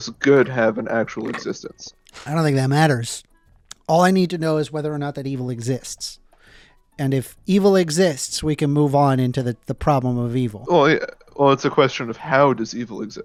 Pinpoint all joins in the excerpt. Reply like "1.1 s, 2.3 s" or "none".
none